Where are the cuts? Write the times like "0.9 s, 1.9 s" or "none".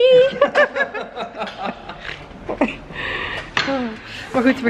none